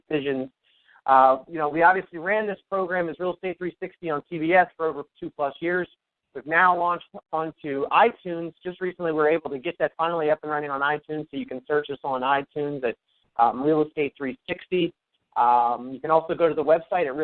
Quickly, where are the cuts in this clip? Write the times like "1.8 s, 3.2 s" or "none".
11.5 s